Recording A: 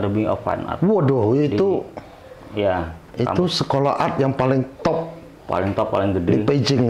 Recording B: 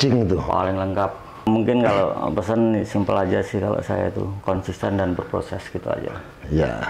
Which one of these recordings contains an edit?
B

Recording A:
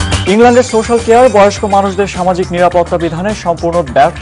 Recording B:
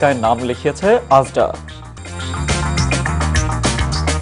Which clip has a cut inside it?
B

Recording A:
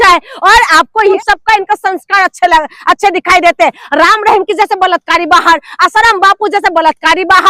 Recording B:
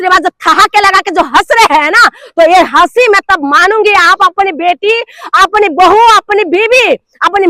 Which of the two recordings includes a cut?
A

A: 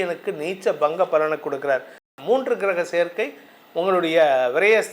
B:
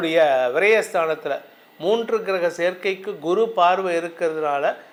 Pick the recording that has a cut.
A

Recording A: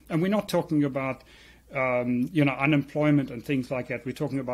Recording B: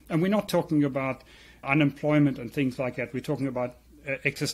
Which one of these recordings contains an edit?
B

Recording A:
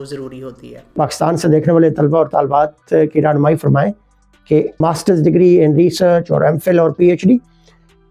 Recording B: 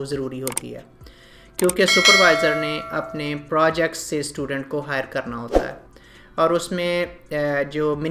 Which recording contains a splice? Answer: A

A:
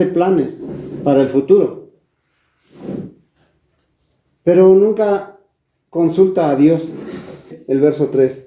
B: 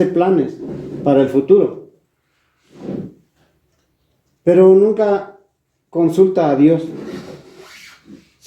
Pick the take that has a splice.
A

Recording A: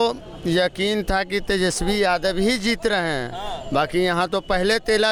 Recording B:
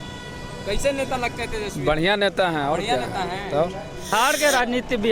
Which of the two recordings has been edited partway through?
B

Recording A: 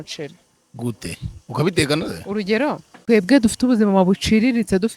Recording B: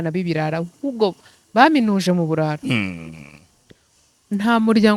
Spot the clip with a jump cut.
A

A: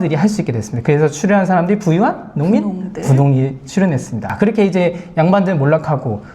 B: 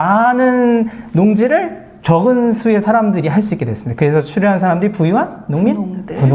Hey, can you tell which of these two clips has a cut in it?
A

